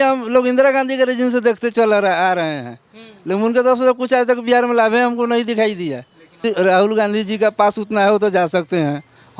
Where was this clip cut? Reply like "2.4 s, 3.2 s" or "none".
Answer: 6.4 s